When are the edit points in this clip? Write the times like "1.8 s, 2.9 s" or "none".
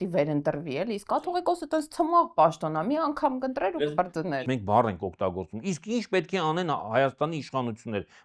4.4 s